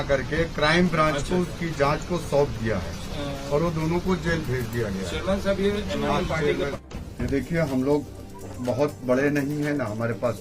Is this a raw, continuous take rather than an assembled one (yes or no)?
no